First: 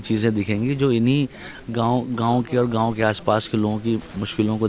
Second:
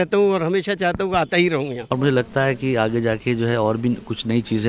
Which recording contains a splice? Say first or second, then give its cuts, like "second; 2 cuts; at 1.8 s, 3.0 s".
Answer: second; 1 cut; at 1.8 s